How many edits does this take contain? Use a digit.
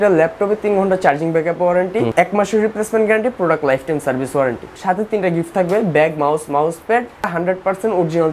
3